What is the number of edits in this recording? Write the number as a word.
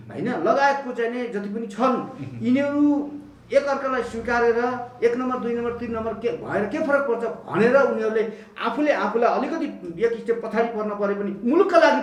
zero